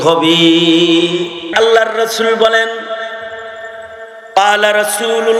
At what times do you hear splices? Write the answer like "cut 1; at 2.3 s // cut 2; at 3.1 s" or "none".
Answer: cut 1; at 1.4 s